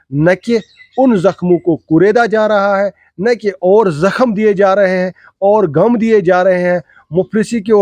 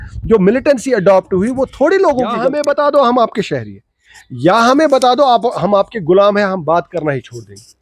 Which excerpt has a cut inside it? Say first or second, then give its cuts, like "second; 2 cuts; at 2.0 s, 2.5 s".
second; 1 cut; at 2.4 s